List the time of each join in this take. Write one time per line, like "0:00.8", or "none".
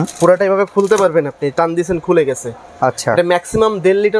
none